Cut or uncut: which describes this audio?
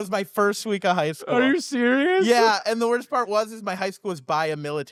uncut